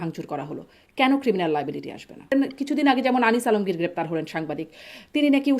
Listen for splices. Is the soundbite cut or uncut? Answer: cut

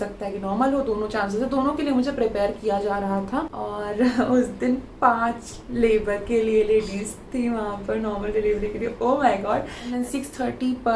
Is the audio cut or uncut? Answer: cut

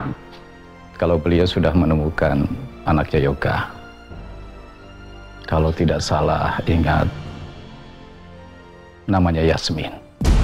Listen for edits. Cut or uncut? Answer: uncut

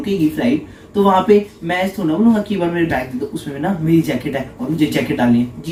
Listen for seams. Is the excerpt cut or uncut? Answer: uncut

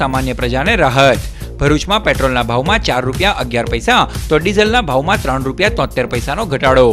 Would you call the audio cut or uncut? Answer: uncut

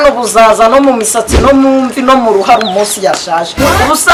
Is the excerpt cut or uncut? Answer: uncut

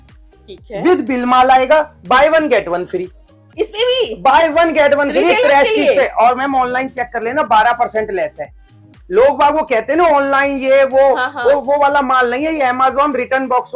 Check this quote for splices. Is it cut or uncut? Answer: uncut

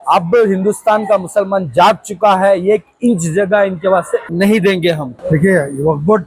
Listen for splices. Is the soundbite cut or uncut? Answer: cut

